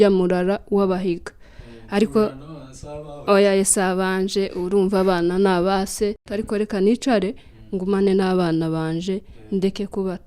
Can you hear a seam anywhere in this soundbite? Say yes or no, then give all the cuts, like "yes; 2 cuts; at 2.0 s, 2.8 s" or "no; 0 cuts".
yes; 1 cut; at 6.3 s